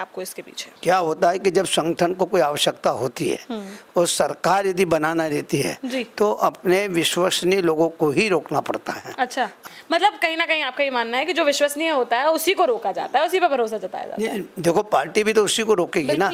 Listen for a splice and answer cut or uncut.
cut